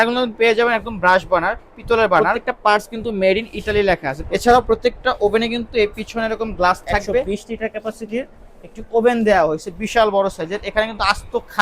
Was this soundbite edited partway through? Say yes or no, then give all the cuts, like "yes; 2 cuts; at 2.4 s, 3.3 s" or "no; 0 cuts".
yes; 3 cuts; at 2.3 s, 4.2 s, 7.3 s